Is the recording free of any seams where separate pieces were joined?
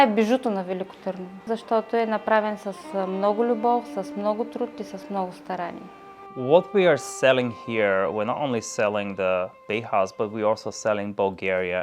no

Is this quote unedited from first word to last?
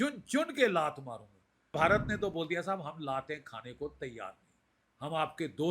no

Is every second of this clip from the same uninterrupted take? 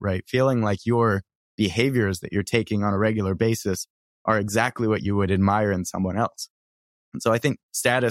yes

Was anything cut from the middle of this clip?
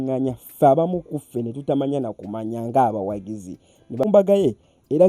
yes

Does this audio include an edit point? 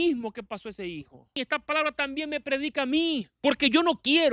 yes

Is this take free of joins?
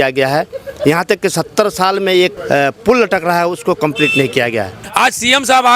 no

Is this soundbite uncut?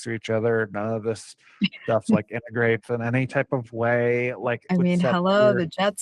no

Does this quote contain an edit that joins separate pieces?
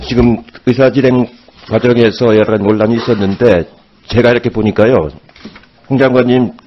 no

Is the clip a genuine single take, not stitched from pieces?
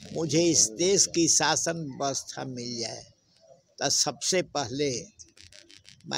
yes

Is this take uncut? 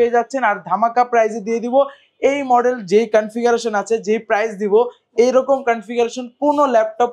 yes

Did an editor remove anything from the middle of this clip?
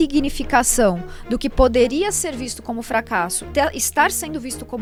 no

